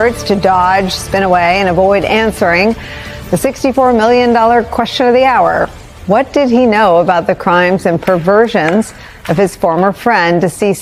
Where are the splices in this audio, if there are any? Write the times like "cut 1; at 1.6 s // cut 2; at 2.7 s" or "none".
none